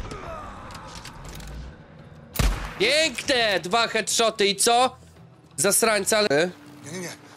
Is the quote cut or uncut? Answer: cut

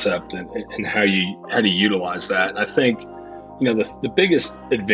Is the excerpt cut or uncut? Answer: uncut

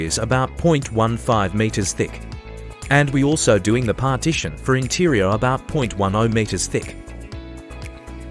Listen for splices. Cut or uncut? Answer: uncut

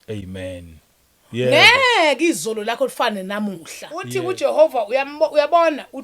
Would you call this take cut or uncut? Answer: cut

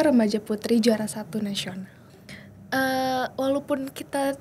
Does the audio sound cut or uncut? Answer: cut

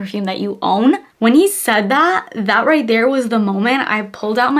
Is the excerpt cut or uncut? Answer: uncut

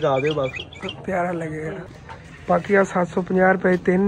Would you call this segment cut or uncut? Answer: cut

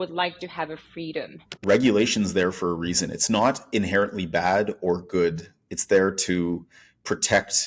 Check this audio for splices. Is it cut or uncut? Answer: cut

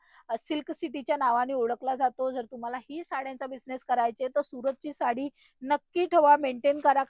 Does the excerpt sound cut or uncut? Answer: uncut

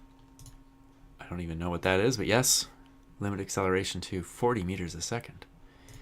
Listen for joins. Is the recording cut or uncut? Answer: cut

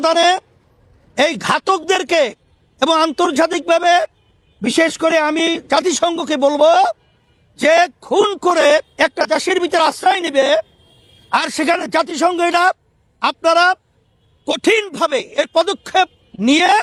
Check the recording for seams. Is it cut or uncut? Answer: uncut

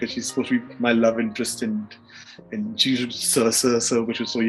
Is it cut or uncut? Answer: uncut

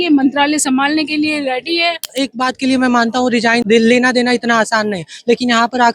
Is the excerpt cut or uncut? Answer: cut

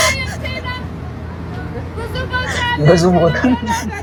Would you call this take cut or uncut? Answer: uncut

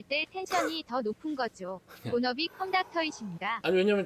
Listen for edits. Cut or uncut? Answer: uncut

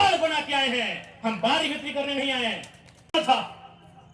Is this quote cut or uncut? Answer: cut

